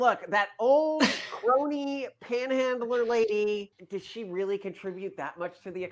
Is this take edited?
yes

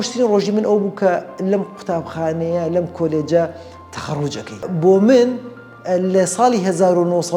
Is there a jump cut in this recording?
yes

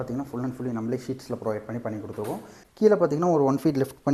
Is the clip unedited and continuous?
no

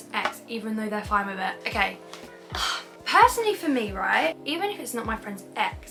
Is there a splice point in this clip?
no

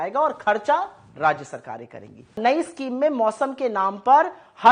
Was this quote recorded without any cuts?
no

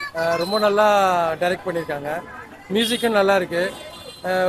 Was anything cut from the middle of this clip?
no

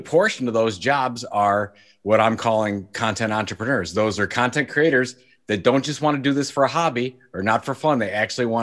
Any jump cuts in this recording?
no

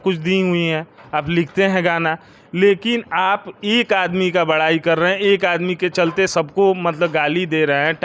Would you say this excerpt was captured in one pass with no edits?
yes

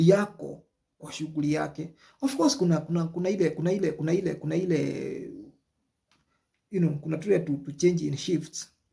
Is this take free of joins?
yes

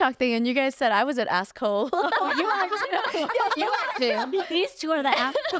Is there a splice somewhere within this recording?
yes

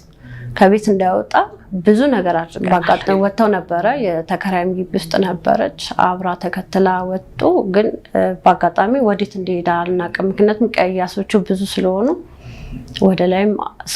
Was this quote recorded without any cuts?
no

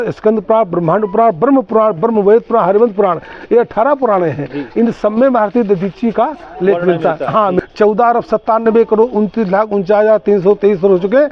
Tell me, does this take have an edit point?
yes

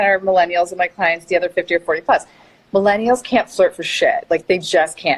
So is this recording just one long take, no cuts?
yes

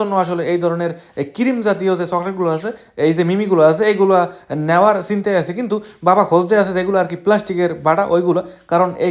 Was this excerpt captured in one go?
yes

